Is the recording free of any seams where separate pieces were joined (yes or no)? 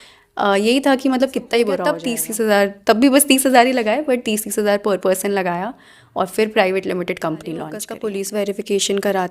no